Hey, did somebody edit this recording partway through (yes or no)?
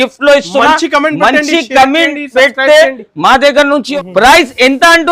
yes